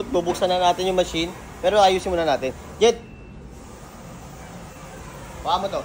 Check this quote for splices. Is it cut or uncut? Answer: uncut